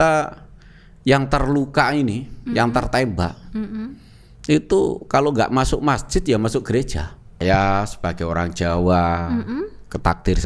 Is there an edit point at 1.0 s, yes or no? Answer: no